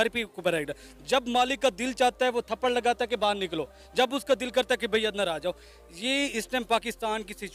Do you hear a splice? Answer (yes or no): no